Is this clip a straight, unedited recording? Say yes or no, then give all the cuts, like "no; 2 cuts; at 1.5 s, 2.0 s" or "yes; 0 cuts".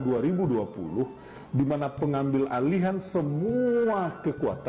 yes; 0 cuts